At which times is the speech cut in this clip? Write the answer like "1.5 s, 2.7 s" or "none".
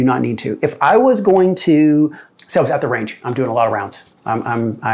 2.2 s